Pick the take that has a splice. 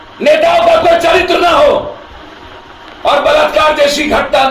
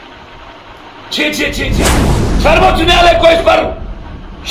second; 1 cut; at 1.8 s

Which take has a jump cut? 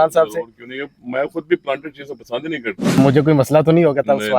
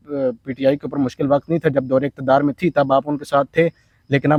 first; 1 cut; at 3.0 s

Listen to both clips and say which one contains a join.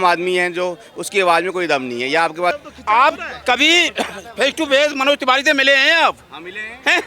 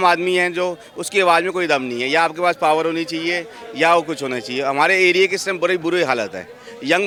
first; 1 cut; at 2.6 s

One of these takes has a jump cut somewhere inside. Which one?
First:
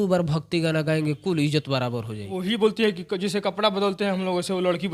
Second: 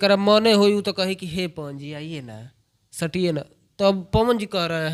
first; 1 cut; at 2.2 s

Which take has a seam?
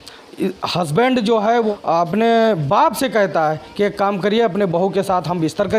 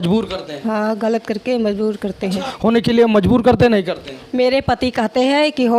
second; 1 cut; at 2.5 s

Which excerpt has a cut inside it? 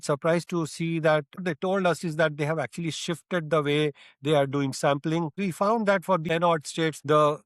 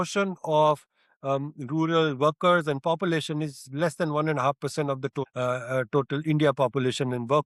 first; 3 cuts; at 1.5 s, 5.4 s, 6.5 s

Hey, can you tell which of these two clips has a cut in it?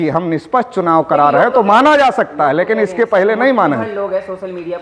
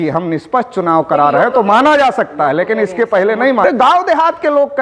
second; 1 cut; at 3.6 s

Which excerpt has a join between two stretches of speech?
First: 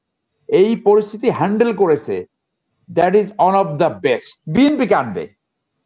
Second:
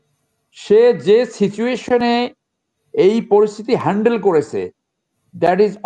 first; 1 cut; at 4.3 s

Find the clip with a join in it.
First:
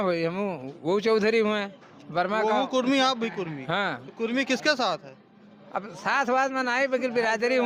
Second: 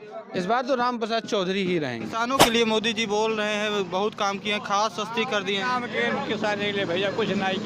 second; 1 cut; at 2.4 s

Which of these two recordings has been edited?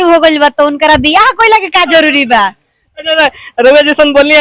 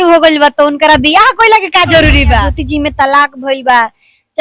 second; 1 cut; at 2.6 s

